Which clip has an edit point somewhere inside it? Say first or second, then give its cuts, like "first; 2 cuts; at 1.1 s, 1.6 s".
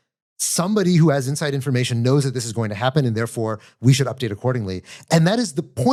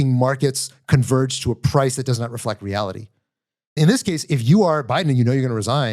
second; 1 cut; at 3.8 s